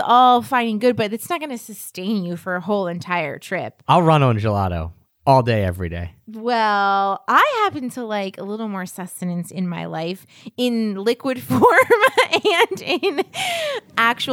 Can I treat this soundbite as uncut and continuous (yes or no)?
yes